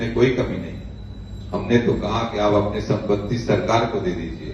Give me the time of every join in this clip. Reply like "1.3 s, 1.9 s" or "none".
none